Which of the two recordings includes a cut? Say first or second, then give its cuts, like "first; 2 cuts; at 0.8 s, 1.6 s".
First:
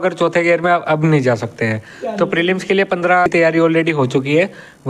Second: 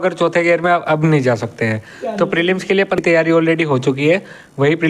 second; 1 cut; at 3.0 s